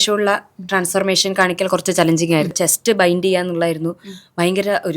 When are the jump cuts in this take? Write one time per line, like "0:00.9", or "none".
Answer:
0:02.5